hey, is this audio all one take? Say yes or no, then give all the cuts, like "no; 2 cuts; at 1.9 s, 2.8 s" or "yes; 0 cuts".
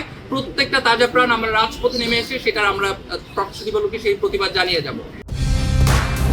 yes; 0 cuts